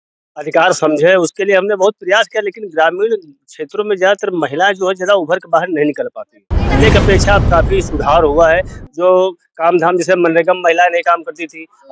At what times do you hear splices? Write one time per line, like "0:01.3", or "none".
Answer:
0:06.6